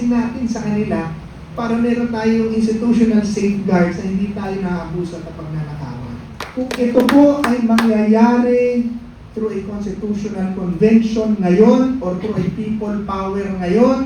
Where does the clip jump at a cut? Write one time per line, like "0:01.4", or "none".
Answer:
0:06.4